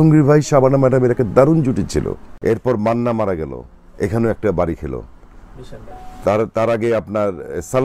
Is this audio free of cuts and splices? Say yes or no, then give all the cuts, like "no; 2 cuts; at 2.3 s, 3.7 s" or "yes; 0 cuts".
no; 1 cut; at 2.3 s